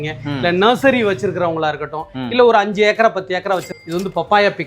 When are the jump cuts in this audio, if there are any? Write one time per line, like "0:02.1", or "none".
0:03.7

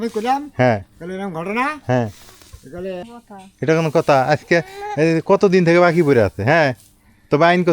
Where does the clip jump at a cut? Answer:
0:03.0

